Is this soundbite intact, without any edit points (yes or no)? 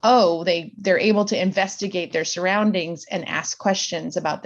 yes